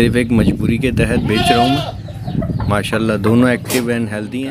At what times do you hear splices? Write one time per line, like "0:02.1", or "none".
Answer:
none